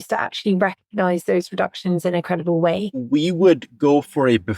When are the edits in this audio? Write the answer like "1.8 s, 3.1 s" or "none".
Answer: 3.0 s